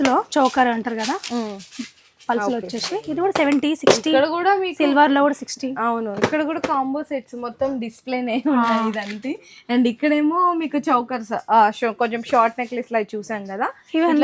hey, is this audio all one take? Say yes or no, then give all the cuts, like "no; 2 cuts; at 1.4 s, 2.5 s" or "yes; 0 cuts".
yes; 0 cuts